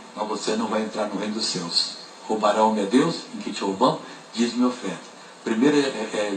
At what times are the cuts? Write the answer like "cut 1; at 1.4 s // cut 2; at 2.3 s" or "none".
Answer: cut 1; at 1.8 s